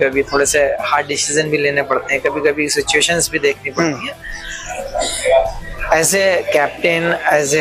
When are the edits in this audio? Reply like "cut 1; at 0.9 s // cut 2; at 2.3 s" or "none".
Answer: none